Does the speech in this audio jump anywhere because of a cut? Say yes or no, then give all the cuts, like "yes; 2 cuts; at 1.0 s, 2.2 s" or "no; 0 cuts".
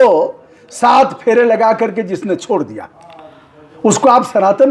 no; 0 cuts